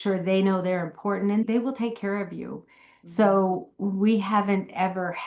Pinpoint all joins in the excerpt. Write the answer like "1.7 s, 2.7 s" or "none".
1.4 s